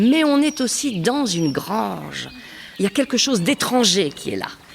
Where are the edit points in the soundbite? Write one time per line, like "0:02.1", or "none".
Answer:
0:02.3